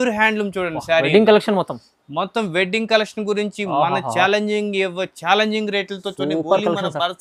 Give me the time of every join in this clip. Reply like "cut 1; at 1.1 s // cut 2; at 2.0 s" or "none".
none